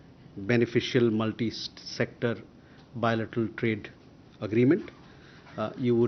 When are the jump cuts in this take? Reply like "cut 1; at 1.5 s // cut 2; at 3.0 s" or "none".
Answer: none